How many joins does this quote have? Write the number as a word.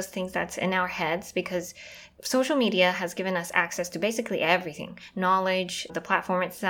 two